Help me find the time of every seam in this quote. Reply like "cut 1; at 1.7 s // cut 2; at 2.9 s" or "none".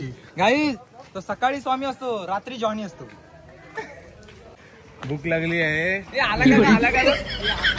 none